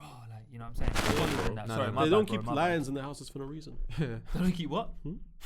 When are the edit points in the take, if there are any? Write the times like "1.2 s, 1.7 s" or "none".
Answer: 1.0 s